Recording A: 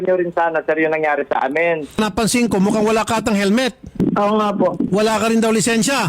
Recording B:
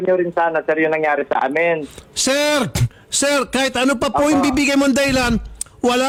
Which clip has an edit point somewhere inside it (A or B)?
A